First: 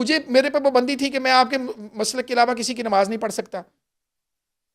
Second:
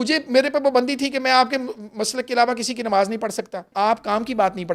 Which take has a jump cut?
second; 1 cut; at 3.7 s

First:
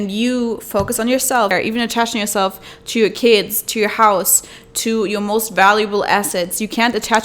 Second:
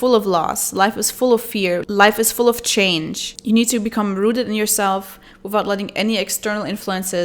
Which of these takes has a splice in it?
first; 1 cut; at 1.5 s

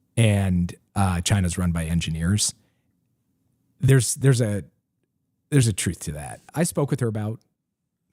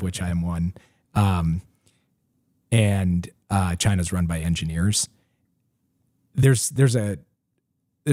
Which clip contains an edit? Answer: first; 1 cut; at 6.5 s

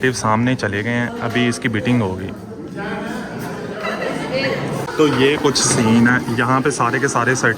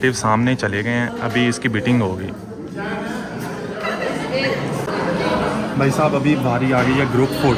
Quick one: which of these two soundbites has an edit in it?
first; 1 cut; at 4.9 s

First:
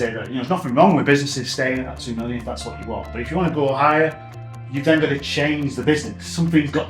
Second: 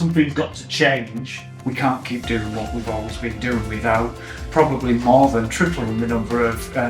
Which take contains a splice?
second; 1 cut; at 1.4 s

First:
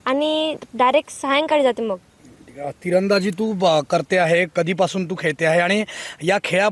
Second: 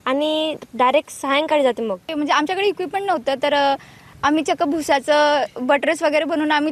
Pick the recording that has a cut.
second; 1 cut; at 2.1 s

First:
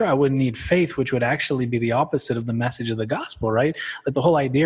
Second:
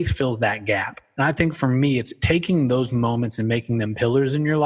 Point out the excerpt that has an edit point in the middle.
second; 2 cuts; at 1.0 s, 2.1 s

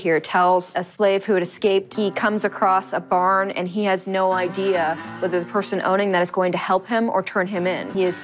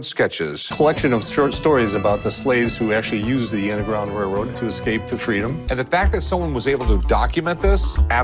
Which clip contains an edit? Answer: second; 1 cut; at 5.6 s

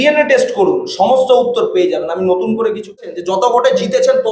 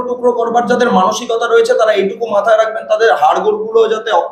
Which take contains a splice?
first; 1 cut; at 3.4 s

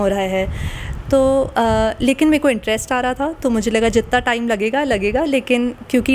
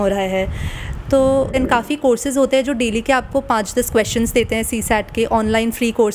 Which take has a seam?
second; 1 cut; at 1.5 s

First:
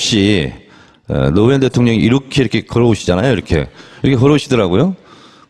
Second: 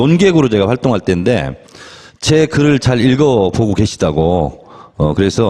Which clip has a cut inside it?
first; 1 cut; at 3.4 s

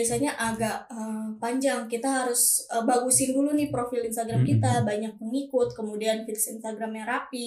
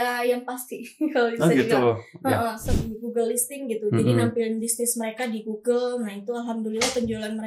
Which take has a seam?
second; 1 cut; at 2.6 s

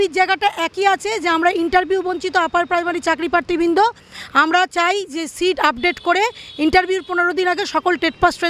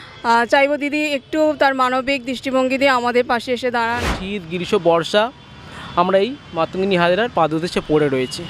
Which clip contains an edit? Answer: second; 1 cut; at 4.2 s

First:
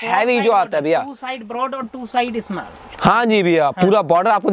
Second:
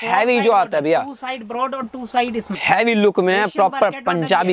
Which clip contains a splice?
second; 1 cut; at 2.5 s

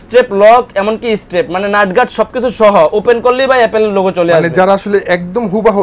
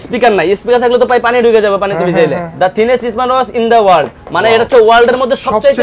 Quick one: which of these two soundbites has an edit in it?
second; 1 cut; at 2.4 s

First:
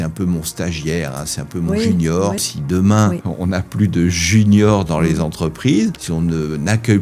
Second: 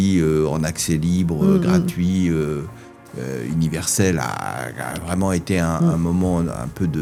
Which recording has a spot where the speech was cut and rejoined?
first; 3 cuts; at 2.5 s, 3.3 s, 6.0 s

